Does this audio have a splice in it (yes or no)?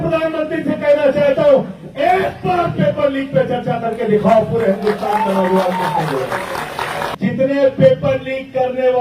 yes